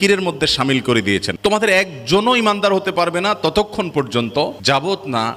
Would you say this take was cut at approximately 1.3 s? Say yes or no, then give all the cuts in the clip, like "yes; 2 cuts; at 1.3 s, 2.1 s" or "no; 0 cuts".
yes; 1 cut; at 1.3 s